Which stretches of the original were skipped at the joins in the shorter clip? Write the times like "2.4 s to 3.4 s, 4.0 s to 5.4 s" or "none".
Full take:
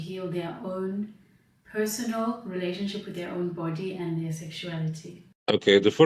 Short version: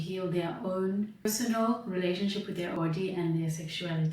1.3 s to 1.8 s, 3.3 s to 3.6 s